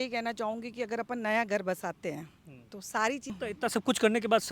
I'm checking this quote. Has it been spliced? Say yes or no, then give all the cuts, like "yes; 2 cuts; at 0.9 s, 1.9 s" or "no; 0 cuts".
yes; 1 cut; at 3.4 s